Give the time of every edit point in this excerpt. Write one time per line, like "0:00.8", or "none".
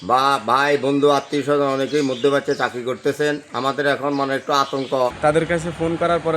0:05.2